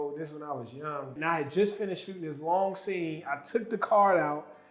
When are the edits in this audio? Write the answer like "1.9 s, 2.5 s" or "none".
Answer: 1.1 s